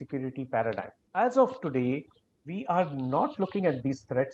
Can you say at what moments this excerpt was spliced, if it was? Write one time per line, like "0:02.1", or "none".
0:00.9